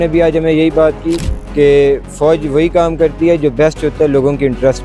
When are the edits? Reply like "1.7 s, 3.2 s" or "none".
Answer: none